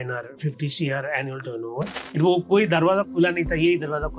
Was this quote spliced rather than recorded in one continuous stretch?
yes; 1 cut; at 2.0 s

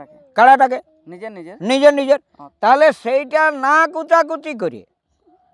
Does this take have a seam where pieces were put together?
no; 0 cuts

